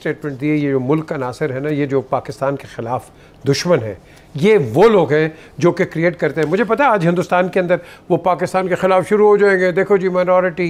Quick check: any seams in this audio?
no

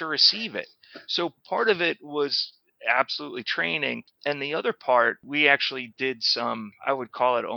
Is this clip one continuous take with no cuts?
no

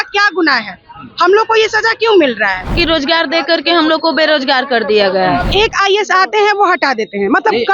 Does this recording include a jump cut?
yes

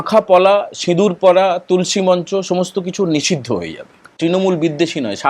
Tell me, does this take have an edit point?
yes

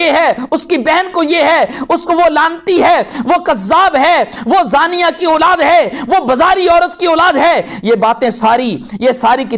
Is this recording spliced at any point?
no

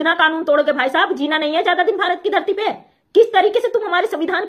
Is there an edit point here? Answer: no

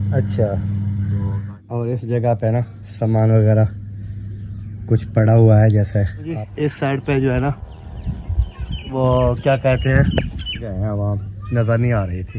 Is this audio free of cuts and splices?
no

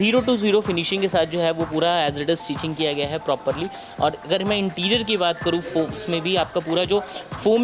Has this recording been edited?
no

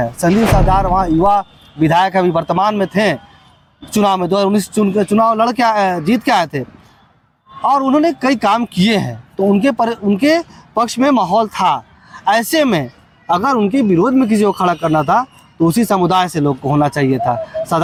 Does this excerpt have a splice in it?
no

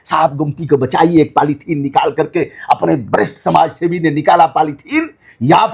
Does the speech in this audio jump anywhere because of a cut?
no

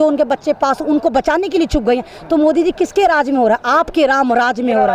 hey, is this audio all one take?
yes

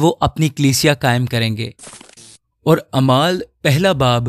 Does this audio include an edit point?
no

